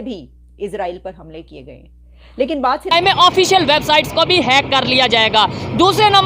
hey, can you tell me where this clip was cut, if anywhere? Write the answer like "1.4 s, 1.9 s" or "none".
2.9 s